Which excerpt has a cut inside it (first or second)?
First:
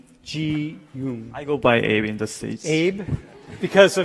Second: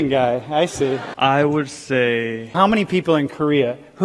second